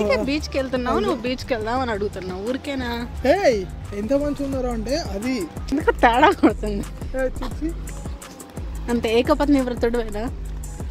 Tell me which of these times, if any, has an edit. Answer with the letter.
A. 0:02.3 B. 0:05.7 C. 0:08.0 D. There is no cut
B